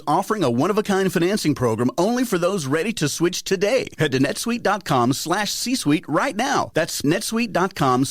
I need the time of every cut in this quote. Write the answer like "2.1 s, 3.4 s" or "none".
7.0 s